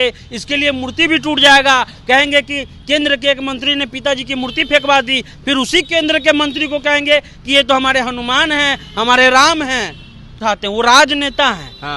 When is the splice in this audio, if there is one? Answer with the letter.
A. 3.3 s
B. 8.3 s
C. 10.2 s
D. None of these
C